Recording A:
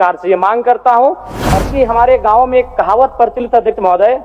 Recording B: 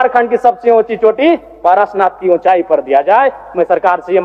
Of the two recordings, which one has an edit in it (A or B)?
A